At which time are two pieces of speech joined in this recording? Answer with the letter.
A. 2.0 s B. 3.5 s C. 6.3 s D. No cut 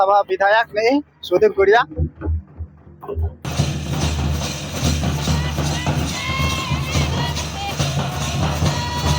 B